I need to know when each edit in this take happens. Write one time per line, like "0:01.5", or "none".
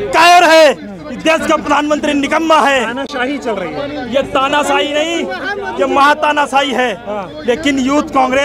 none